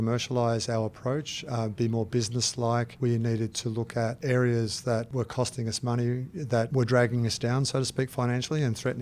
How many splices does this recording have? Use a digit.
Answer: 4